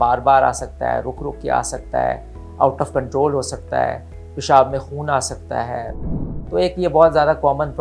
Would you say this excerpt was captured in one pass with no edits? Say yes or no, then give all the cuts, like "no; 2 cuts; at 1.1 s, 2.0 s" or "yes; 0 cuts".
no; 1 cut; at 6.0 s